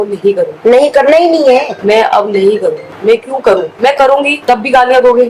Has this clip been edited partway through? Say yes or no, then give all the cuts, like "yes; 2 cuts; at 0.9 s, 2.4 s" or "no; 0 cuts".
no; 0 cuts